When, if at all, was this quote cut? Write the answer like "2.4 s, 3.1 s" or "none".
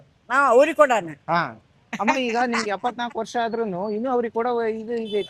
none